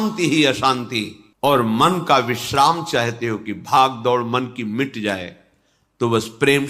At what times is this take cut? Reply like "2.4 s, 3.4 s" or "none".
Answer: 1.2 s

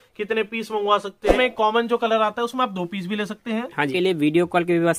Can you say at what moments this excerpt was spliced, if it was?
1.3 s, 3.9 s

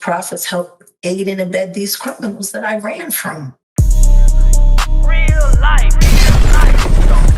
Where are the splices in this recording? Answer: 3.6 s

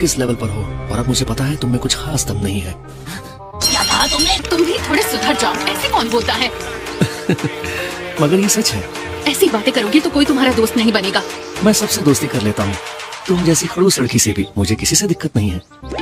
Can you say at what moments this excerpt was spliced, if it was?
4.4 s

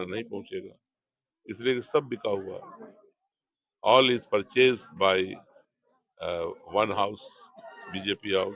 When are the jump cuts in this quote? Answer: none

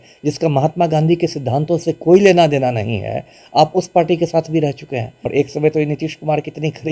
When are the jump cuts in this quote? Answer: 5.2 s

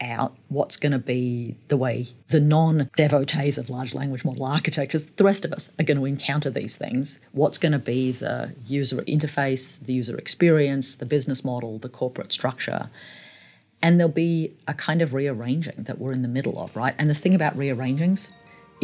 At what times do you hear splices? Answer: 2.1 s, 2.9 s, 9.0 s

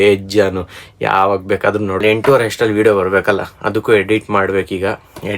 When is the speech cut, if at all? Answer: 2.0 s

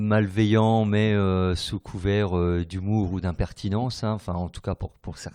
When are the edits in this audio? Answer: none

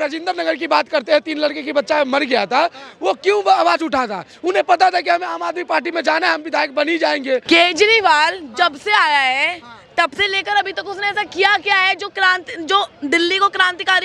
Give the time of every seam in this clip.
7.4 s

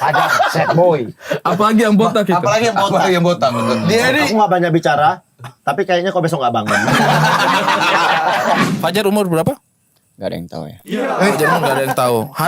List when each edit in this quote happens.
8.6 s

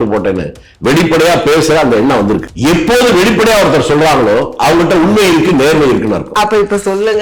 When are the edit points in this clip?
2.5 s

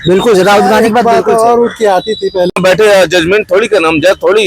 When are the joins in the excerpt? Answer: 2.6 s

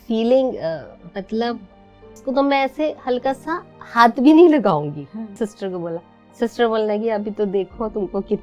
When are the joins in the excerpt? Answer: 2.1 s, 5.5 s

